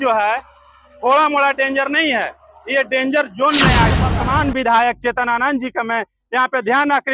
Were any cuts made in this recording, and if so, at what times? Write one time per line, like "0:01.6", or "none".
0:04.1